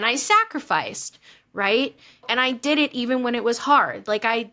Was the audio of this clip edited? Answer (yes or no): yes